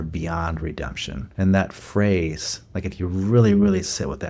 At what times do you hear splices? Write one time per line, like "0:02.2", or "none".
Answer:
0:01.2